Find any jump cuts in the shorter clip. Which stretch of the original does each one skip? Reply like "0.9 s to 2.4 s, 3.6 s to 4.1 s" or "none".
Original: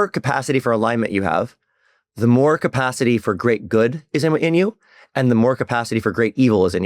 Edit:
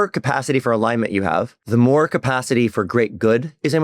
1.6 s to 2.1 s